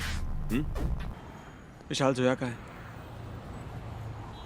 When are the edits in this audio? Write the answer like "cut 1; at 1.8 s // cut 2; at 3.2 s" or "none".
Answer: cut 1; at 1.1 s